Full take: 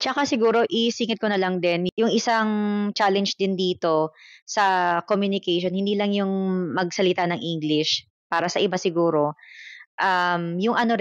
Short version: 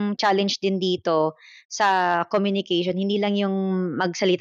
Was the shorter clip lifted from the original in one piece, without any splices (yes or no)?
yes